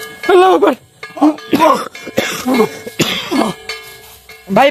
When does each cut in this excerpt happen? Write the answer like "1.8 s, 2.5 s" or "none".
none